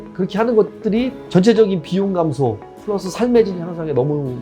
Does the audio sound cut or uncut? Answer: cut